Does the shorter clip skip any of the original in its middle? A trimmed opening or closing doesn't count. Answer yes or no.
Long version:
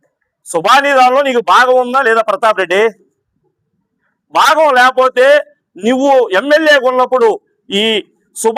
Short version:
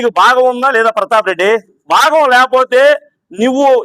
yes